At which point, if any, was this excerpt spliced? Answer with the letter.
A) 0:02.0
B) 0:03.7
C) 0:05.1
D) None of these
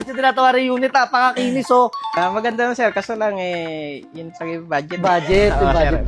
A